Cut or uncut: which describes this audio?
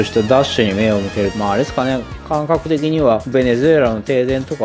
cut